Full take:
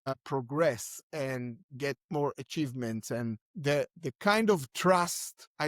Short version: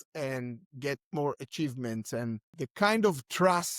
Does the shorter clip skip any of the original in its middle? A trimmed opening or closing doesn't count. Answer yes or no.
yes